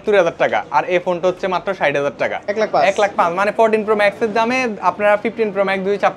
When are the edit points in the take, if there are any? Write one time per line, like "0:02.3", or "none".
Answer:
0:02.4

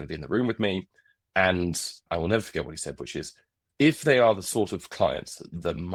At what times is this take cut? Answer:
none

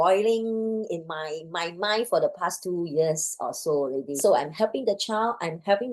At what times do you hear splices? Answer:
0:04.2

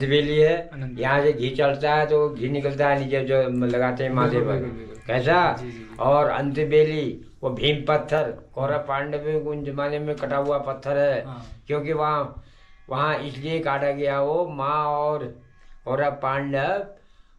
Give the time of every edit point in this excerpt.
none

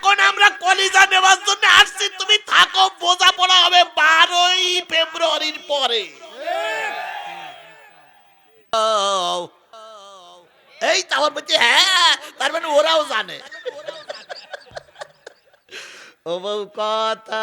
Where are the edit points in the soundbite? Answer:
0:08.7

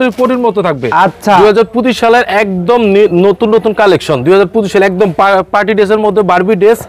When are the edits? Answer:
0:01.4

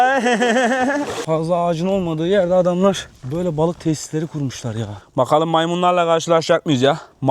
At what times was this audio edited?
0:01.2
0:05.0

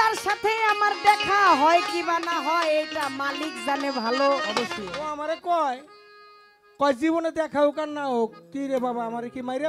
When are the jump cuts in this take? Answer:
0:04.8

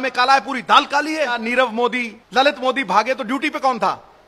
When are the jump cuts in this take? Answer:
0:01.4
0:02.2

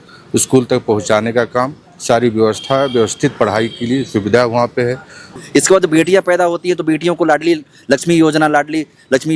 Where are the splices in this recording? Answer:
0:05.3

